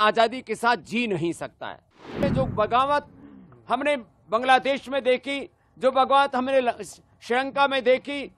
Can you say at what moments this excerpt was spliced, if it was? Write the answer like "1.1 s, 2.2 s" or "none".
2.2 s